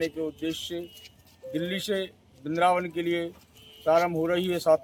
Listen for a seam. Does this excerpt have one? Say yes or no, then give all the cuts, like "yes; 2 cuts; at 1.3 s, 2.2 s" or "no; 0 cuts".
no; 0 cuts